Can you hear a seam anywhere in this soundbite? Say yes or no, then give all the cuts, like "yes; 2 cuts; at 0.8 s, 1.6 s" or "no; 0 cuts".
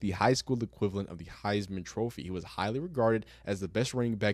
no; 0 cuts